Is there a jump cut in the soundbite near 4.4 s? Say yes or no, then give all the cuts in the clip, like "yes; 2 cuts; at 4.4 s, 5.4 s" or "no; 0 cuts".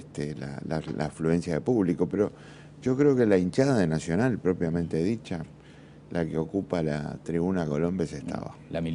no; 1 cut; at 1.4 s